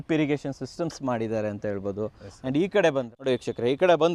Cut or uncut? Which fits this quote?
cut